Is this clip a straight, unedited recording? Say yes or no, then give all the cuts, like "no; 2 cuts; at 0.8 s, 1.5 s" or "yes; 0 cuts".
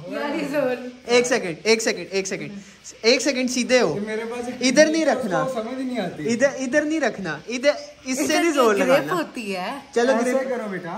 yes; 0 cuts